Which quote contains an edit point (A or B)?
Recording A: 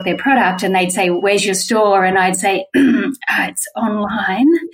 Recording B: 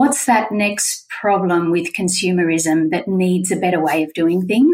A